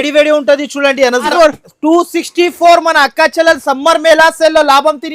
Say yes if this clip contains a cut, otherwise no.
yes